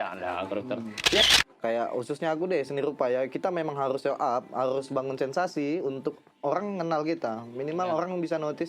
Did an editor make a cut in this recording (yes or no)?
yes